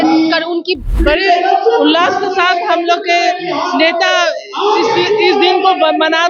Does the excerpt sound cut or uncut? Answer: cut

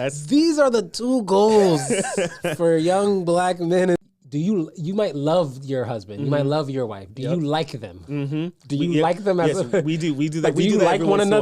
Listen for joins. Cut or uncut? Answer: cut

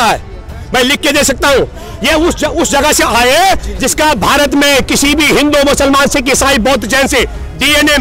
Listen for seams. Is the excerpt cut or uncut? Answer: uncut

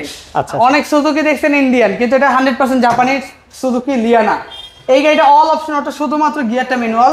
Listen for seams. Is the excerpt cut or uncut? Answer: uncut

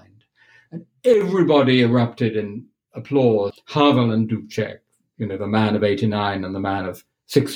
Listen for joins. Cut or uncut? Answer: cut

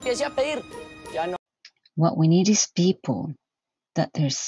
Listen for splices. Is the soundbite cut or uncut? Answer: uncut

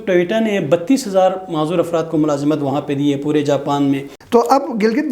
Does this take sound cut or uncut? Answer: cut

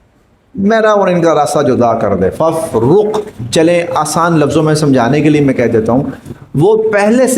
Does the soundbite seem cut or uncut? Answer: cut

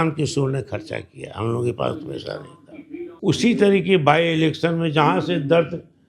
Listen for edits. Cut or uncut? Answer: cut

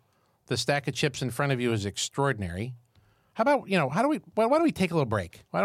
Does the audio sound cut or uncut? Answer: uncut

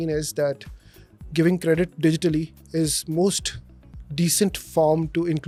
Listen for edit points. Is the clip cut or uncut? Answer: uncut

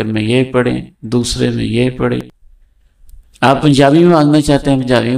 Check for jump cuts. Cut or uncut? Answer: cut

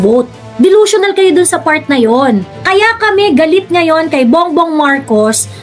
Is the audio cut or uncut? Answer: cut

